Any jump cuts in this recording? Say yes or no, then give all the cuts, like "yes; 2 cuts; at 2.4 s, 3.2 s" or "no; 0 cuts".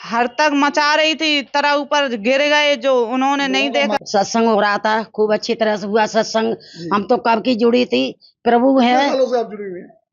no; 0 cuts